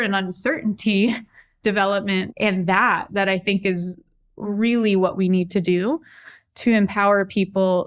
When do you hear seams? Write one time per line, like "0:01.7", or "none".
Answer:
0:02.3